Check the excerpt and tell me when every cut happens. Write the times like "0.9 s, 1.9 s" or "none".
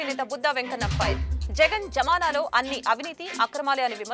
none